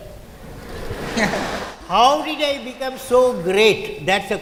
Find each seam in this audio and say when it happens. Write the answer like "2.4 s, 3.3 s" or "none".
none